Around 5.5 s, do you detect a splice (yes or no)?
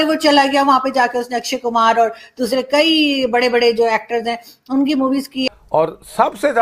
yes